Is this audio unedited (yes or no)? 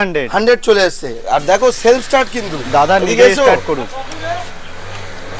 yes